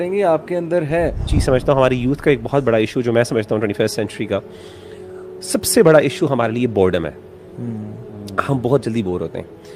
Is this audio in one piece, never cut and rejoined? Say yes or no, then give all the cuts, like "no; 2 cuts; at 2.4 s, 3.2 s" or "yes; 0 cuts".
no; 1 cut; at 1.3 s